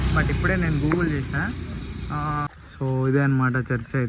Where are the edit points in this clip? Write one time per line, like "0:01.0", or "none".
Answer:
0:02.8